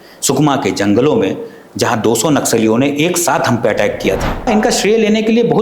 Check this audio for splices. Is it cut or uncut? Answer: cut